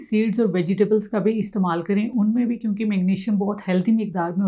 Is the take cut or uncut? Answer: uncut